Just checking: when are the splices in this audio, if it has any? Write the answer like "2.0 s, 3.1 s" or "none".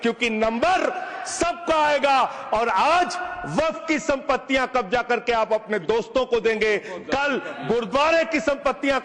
none